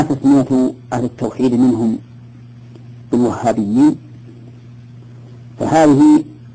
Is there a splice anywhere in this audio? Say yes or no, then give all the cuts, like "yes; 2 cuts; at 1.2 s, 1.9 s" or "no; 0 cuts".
no; 0 cuts